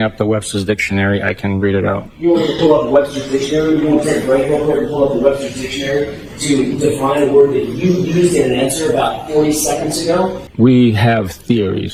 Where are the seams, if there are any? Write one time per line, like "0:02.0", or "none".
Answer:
none